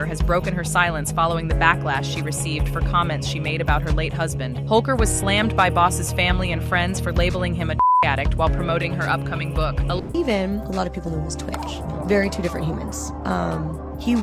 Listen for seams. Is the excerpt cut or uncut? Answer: cut